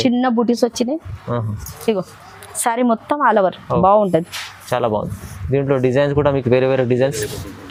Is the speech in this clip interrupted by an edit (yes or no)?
no